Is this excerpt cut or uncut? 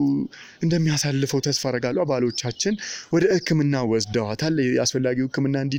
uncut